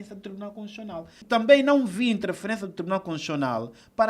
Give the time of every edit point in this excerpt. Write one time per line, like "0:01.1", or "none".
0:01.2